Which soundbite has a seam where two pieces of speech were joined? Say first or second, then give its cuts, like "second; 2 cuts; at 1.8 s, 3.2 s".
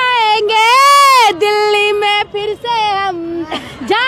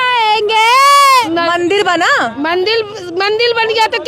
second; 1 cut; at 1.2 s